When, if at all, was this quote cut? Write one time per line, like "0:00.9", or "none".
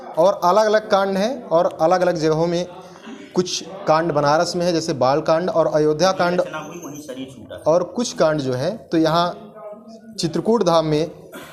none